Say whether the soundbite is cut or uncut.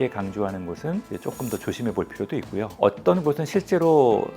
cut